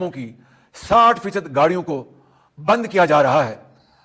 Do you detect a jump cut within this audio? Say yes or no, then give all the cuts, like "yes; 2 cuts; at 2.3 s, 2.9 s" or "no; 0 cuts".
no; 0 cuts